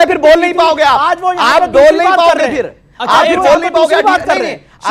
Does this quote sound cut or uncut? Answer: uncut